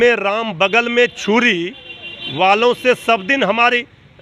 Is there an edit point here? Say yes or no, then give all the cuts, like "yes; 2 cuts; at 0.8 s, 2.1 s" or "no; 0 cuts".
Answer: no; 0 cuts